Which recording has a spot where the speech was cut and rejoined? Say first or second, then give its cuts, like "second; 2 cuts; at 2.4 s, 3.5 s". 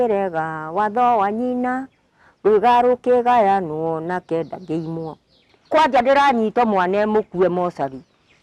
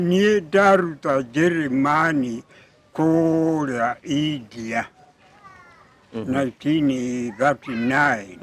first; 1 cut; at 5.4 s